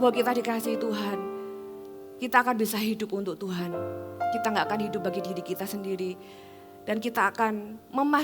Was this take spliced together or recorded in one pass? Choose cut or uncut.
uncut